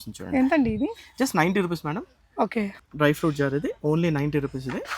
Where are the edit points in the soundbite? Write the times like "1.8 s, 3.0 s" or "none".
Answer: 2.7 s